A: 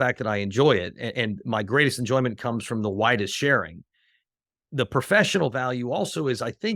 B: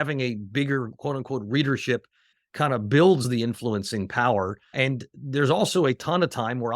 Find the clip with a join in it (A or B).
B